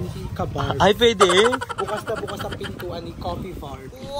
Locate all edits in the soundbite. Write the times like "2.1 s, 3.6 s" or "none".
1.7 s

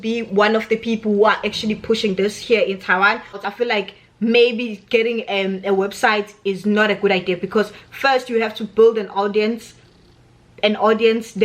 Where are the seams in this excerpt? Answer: 3.4 s

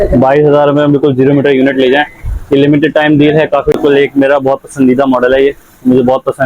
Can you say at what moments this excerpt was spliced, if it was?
3.7 s

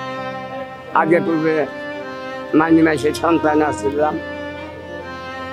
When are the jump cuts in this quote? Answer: none

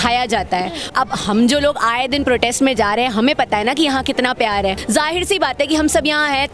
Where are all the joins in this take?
0.9 s, 4.8 s

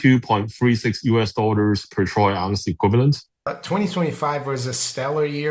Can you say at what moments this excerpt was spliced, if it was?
3.5 s

